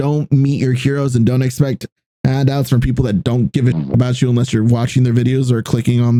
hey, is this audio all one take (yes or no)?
yes